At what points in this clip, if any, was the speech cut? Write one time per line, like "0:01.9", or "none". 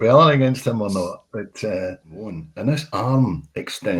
0:02.4